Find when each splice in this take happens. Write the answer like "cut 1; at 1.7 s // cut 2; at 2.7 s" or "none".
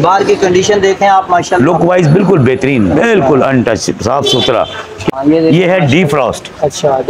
cut 1; at 5.1 s